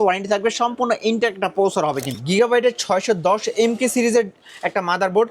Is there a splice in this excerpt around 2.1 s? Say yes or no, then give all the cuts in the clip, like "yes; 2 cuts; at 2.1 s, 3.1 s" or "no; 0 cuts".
yes; 1 cut; at 2.1 s